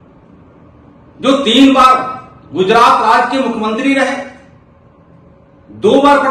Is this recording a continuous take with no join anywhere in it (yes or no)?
yes